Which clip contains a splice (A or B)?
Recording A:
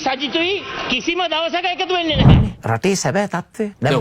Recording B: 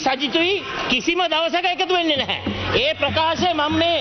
A